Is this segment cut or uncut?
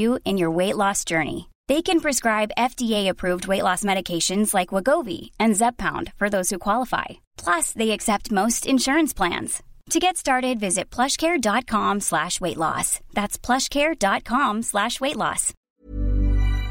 cut